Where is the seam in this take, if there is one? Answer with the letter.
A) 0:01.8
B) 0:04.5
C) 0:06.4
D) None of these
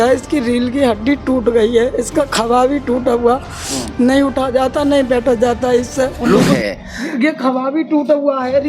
C